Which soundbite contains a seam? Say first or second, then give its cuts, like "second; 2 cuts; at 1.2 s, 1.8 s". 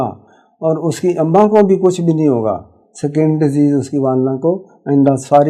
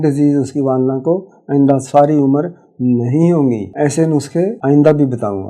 second; 2 cuts; at 3.7 s, 4.6 s